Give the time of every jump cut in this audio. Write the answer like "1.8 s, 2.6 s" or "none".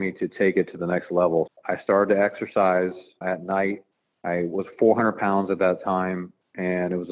1.5 s, 3.2 s